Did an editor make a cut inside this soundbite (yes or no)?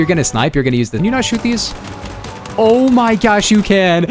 yes